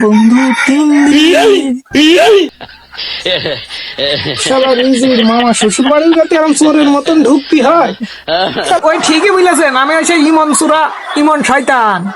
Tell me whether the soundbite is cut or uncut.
cut